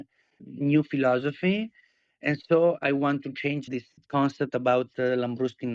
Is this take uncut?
no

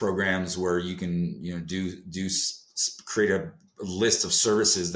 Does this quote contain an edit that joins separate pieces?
no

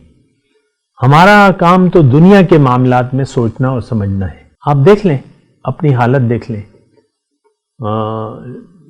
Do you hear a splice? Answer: yes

